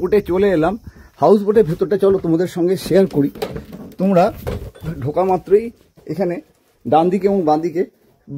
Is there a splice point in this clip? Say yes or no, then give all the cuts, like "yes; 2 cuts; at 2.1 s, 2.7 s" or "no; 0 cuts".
no; 0 cuts